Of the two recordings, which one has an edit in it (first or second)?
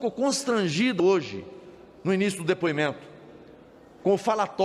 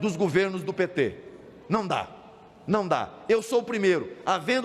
first